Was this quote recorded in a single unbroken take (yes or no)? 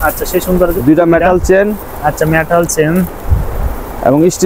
yes